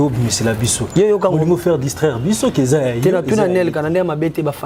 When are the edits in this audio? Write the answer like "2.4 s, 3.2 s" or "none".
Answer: none